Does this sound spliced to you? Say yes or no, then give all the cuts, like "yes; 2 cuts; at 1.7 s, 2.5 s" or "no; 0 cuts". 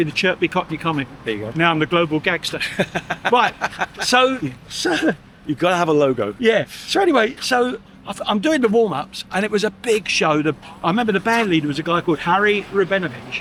no; 0 cuts